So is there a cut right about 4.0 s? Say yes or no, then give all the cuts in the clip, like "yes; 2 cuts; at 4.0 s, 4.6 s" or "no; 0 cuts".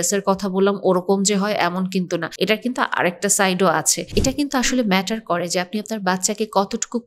yes; 2 cuts; at 2.3 s, 4.0 s